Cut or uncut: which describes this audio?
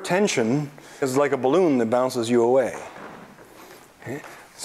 cut